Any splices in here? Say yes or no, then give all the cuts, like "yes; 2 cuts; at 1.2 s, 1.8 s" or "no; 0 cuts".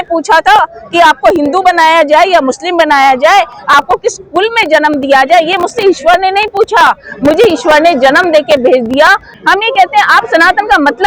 yes; 1 cut; at 9.3 s